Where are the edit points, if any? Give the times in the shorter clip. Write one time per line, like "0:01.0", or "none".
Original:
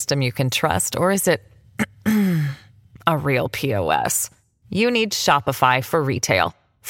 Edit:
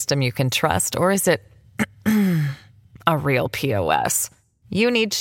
none